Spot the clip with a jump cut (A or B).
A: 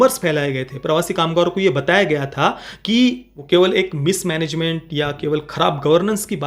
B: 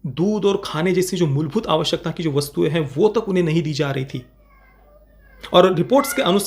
A